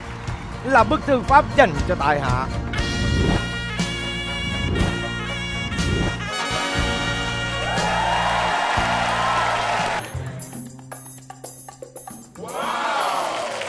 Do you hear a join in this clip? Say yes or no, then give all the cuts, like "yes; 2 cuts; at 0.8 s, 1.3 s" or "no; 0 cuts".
yes; 1 cut; at 10.0 s